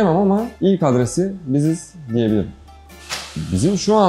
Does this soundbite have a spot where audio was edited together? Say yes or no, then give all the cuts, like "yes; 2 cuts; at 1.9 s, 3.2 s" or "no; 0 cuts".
yes; 1 cut; at 2.6 s